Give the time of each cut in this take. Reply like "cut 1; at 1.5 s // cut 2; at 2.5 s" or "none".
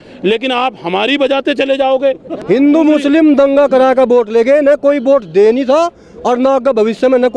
cut 1; at 2.3 s